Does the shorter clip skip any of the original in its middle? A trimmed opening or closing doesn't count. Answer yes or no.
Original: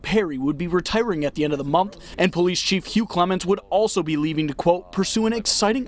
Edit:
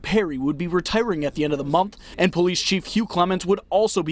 no